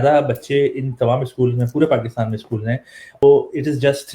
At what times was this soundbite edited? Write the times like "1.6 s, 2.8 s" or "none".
3.2 s